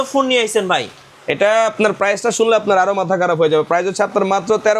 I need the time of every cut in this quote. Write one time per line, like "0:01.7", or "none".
none